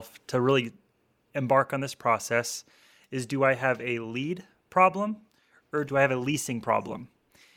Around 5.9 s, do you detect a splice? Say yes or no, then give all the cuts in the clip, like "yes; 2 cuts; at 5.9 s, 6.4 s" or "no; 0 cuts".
yes; 1 cut; at 5.9 s